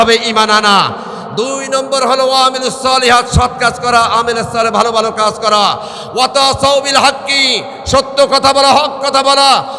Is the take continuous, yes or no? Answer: yes